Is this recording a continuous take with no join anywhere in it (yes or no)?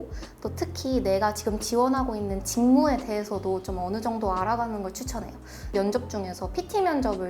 no